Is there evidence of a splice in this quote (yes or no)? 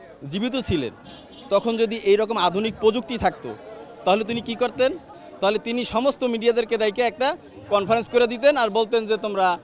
no